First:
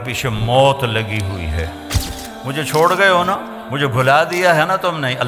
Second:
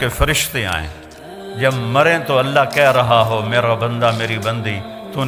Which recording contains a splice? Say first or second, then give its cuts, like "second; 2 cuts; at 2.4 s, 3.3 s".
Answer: first; 1 cut; at 2.0 s